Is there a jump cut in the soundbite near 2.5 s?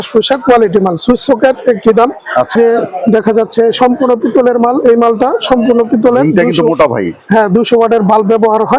yes; 1 cut; at 2.5 s

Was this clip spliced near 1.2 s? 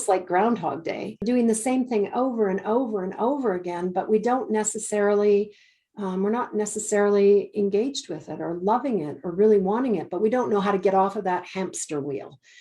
yes; 1 cut; at 1.2 s

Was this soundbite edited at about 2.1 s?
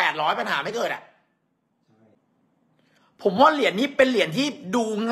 yes; 1 cut; at 2.1 s

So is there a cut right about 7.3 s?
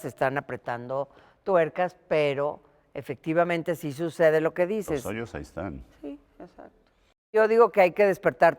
yes; 1 cut; at 7.3 s

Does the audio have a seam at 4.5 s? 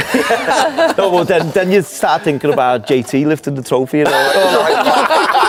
no; 0 cuts

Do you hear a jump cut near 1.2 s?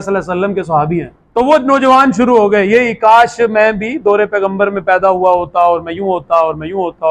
yes; 1 cut; at 1.2 s

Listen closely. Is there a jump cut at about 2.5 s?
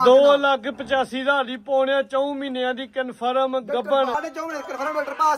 no; 1 cut; at 4.1 s

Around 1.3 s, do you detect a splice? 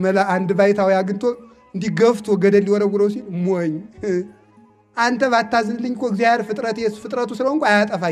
no; 0 cuts

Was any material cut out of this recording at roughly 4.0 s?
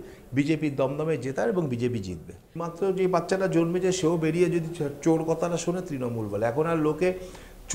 no; 1 cut; at 2.6 s

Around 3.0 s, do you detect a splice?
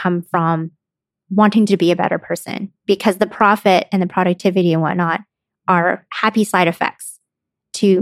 no; 0 cuts

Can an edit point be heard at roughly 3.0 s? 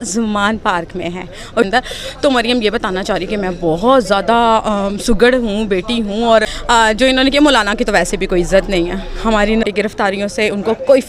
no; 3 cuts; at 1.6 s, 6.6 s, 9.6 s

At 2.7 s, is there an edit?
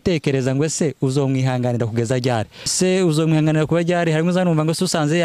yes; 1 cut; at 2.7 s

